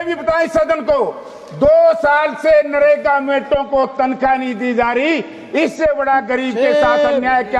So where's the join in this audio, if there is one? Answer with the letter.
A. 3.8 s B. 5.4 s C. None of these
C